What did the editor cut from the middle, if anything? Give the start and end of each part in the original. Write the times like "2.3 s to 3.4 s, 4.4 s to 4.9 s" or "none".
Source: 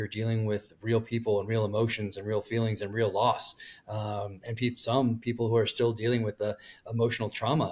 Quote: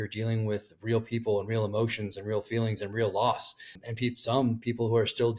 3.8 s to 4.4 s